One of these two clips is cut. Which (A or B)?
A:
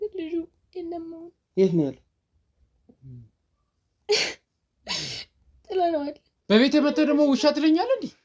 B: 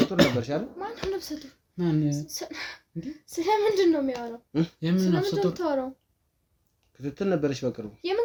A